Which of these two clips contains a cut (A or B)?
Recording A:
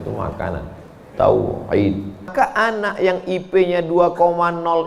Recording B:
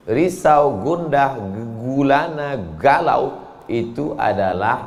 A